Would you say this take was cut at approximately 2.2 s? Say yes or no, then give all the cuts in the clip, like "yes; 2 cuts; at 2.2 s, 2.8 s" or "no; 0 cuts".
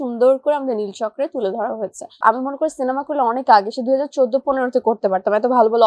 yes; 1 cut; at 2.2 s